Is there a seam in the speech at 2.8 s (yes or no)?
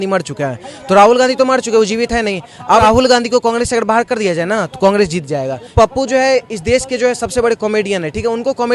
yes